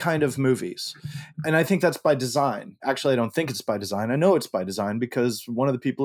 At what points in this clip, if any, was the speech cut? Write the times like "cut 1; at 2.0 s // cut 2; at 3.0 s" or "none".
cut 1; at 1.3 s // cut 2; at 2.8 s